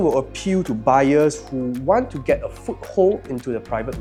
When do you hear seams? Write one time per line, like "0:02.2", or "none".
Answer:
none